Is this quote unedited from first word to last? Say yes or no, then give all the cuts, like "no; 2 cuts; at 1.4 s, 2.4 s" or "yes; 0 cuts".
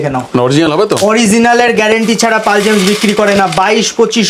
yes; 0 cuts